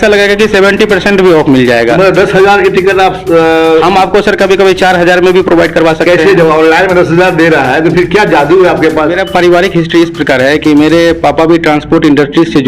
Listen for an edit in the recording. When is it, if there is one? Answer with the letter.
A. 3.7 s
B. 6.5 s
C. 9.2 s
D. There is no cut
C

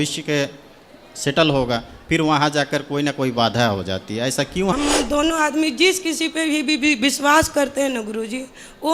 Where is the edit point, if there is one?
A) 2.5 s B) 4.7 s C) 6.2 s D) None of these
B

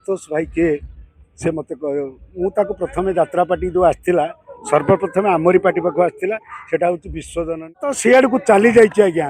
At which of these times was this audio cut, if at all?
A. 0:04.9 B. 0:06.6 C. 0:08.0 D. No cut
C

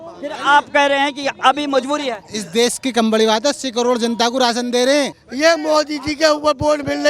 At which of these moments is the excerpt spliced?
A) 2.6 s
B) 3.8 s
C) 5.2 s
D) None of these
C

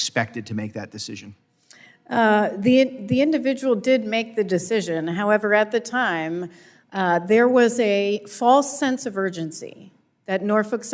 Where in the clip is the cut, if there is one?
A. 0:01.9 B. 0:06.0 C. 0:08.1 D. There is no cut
D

